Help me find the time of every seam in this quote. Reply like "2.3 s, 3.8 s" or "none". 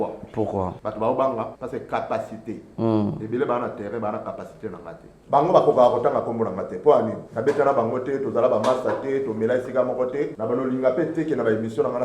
0.8 s, 1.6 s, 5.1 s, 7.2 s, 10.4 s